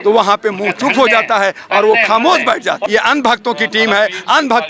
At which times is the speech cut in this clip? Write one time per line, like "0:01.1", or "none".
0:02.8